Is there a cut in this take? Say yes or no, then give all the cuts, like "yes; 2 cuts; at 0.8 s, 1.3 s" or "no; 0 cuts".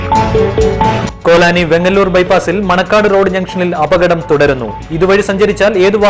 yes; 1 cut; at 0.9 s